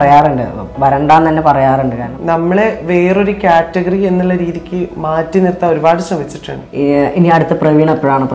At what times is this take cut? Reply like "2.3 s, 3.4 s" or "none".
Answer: 2.1 s, 6.6 s